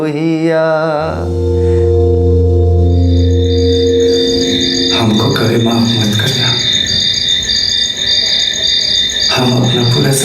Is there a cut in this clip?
yes; 1 cut; at 1.5 s

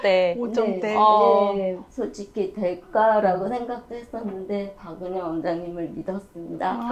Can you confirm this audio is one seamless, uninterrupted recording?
no; 1 cut; at 1.8 s

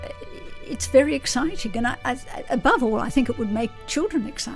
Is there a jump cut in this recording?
no; 0 cuts

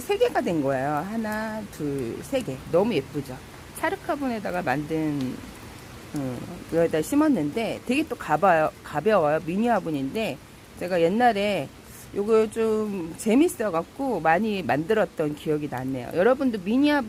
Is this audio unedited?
yes; 0 cuts

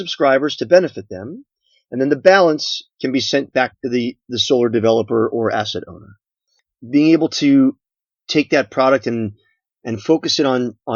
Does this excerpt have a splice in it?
yes; 1 cut; at 6.7 s

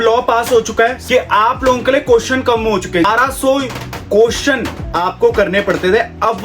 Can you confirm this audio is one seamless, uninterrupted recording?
no; 2 cuts; at 1.0 s, 3.1 s

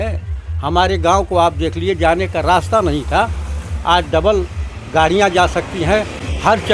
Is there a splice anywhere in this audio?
no; 0 cuts

